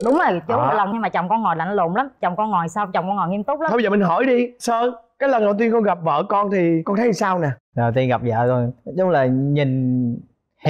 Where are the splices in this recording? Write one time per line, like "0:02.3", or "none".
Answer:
none